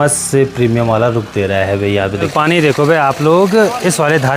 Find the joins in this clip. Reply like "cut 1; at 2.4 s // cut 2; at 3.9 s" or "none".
cut 1; at 2.3 s